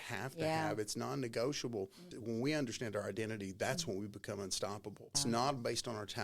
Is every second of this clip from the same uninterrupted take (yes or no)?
no